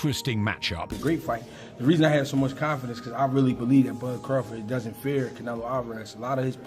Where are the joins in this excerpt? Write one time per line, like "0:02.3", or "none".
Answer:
0:01.0